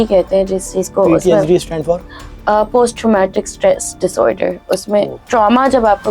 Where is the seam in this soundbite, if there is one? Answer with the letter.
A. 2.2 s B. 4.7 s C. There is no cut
C